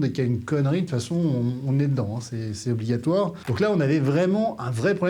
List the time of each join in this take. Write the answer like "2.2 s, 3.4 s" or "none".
3.4 s